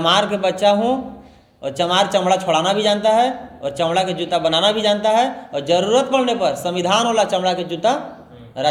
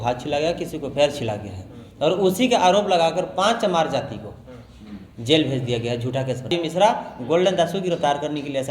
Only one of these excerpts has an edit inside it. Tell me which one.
second; 1 cut; at 6.5 s

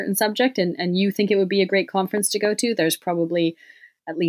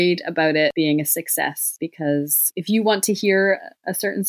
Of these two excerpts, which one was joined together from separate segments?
second; 3 cuts; at 0.7 s, 1.7 s, 2.5 s

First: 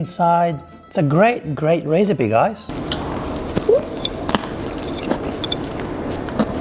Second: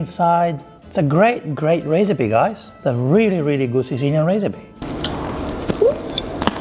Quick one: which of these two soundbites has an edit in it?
first; 1 cut; at 2.7 s

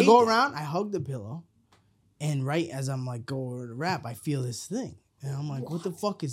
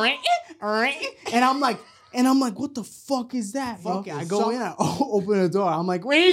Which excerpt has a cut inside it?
second; 1 cut; at 4.1 s

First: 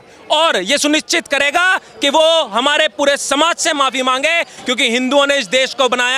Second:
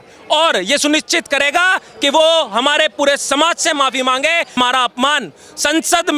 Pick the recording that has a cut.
second; 1 cut; at 4.6 s

